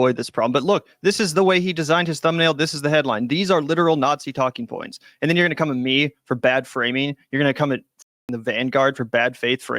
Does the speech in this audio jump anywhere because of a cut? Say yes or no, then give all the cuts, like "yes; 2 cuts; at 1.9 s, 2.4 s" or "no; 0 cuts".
no; 0 cuts